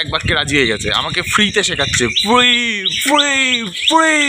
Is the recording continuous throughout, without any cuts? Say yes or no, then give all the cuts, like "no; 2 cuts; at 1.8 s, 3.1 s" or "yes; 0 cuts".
yes; 0 cuts